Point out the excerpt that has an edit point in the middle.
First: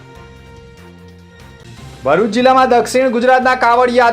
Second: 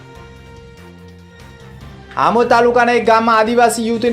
first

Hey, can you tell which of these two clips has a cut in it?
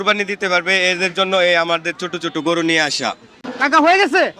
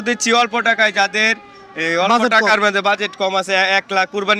first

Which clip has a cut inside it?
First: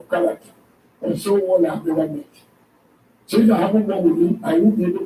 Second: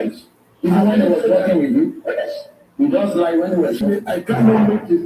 second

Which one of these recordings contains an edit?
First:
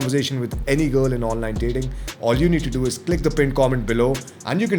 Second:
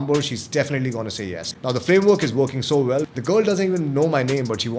second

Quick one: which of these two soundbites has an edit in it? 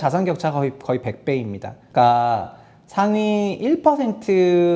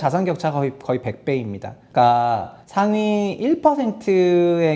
second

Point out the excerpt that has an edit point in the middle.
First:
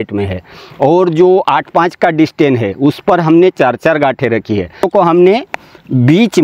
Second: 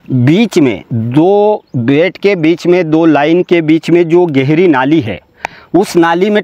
first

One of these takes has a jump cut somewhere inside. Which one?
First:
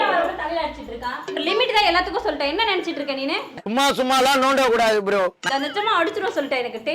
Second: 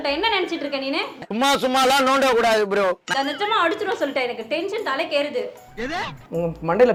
first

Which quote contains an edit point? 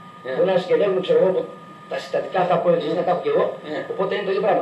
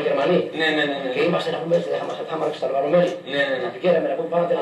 first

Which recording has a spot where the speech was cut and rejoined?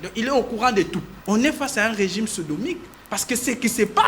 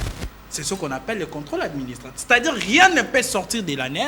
first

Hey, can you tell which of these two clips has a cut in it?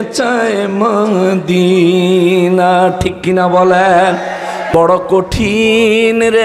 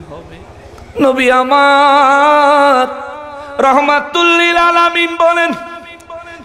first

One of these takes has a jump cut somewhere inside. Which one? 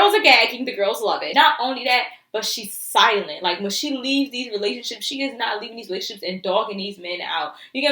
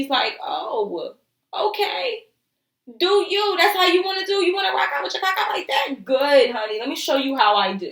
first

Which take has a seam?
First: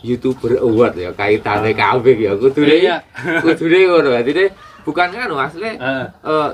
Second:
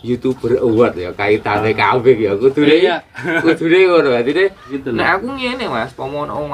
second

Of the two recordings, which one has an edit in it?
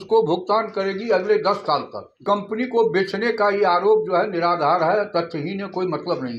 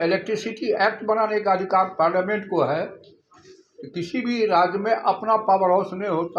first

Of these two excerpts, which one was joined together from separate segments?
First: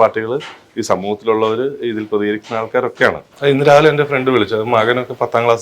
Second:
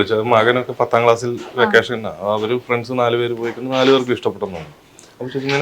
first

